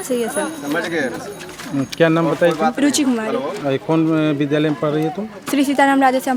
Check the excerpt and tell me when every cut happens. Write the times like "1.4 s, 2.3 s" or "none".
none